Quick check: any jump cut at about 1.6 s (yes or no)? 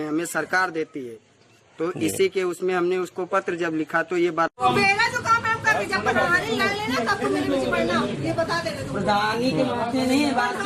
no